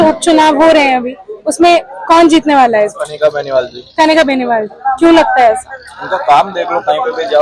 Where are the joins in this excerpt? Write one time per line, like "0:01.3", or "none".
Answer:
none